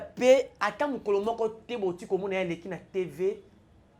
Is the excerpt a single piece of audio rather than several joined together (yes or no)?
yes